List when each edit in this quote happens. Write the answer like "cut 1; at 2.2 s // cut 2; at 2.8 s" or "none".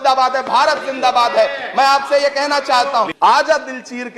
cut 1; at 3.1 s